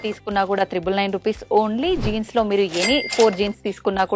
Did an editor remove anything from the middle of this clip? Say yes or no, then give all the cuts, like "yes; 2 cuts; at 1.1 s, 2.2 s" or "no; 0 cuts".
no; 0 cuts